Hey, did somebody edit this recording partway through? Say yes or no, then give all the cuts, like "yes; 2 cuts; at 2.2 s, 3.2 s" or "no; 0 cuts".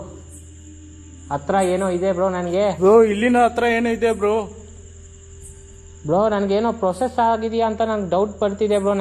yes; 1 cut; at 2.8 s